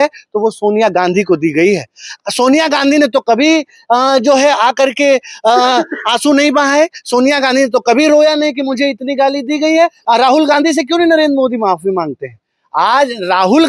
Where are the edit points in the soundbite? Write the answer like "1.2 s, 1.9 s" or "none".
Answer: 10.0 s

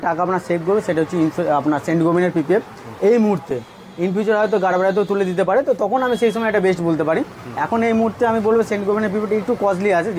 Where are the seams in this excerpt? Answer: none

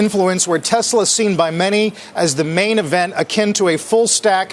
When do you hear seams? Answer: none

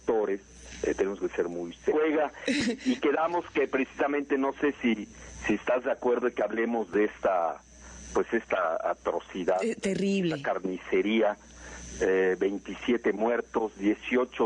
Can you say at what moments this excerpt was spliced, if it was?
none

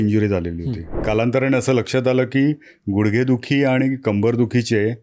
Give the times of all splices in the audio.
1.0 s

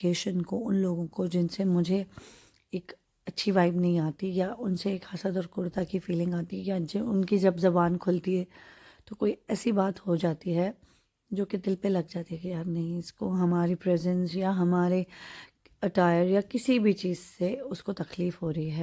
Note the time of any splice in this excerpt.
none

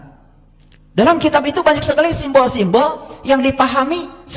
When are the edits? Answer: none

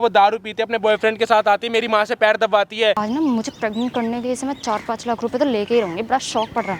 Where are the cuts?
3.0 s

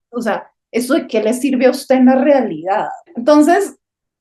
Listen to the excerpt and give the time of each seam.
3.0 s

